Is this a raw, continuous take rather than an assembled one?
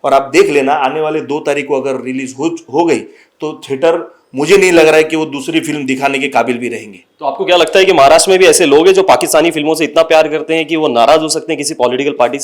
yes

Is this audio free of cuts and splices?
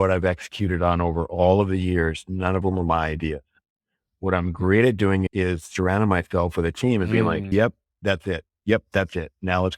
no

